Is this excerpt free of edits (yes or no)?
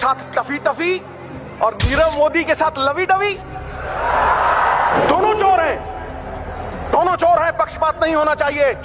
yes